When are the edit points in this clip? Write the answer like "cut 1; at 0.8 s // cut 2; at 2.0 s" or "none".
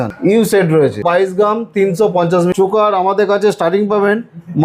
cut 1; at 1.0 s // cut 2; at 2.5 s